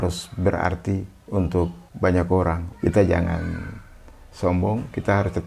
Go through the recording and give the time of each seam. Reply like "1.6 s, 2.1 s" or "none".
1.8 s, 2.7 s

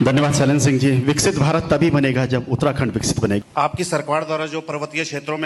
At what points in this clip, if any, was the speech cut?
3.4 s

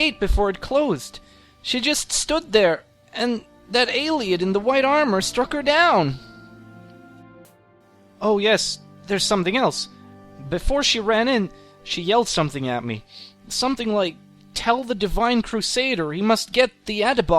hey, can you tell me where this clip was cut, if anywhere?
7.5 s

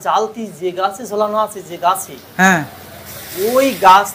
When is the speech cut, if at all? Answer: none

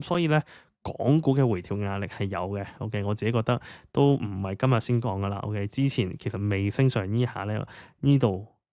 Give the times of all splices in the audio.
none

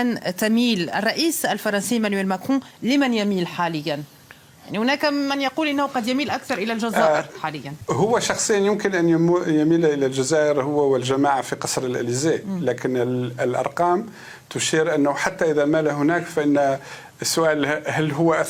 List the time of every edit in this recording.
none

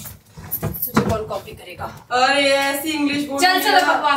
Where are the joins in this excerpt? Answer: 1.9 s

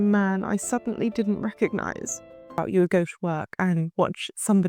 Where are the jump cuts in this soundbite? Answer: 2.6 s

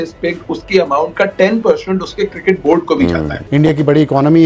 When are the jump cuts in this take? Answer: 3.4 s

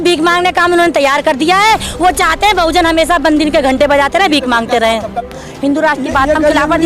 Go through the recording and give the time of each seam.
5.2 s

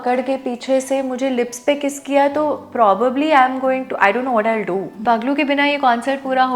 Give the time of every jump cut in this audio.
5.0 s

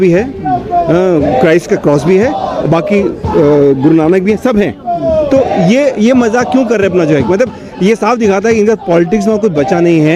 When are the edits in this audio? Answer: none

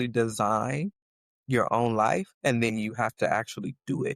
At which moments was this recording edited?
2.3 s

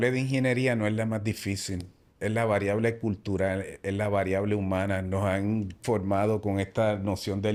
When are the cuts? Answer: none

